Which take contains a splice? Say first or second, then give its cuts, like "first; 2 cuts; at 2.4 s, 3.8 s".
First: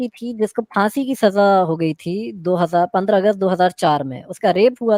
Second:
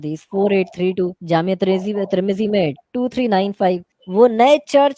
second; 2 cuts; at 1.2 s, 3.9 s